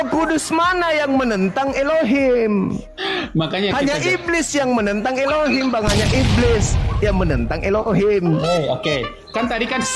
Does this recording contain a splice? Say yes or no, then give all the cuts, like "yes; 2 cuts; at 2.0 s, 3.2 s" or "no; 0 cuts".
no; 0 cuts